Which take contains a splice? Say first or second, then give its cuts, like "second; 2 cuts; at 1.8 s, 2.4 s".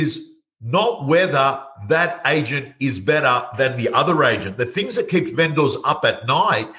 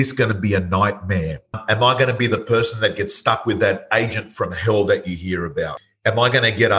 second; 2 cuts; at 1.6 s, 5.8 s